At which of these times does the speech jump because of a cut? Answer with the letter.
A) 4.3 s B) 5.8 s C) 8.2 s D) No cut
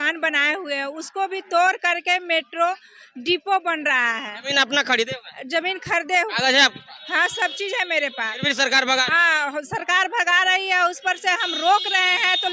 D